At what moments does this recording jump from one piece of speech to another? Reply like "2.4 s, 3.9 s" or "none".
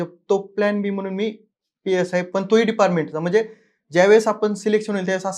none